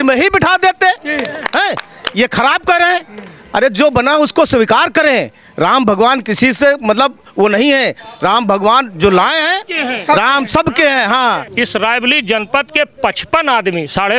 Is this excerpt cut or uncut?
cut